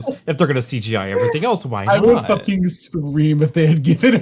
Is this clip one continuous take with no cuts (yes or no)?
yes